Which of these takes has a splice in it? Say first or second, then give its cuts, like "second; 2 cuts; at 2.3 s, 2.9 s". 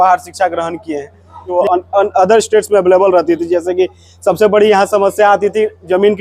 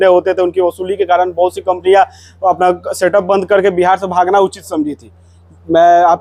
first; 1 cut; at 1.5 s